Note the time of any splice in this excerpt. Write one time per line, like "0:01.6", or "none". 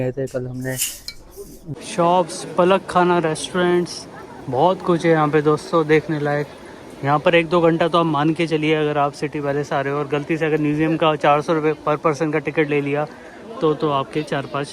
0:01.6